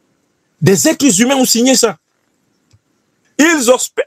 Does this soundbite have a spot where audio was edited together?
yes; 1 cut; at 3.2 s

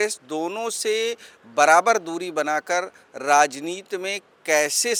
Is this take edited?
no; 0 cuts

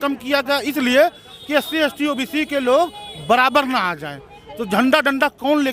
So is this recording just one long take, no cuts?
yes; 0 cuts

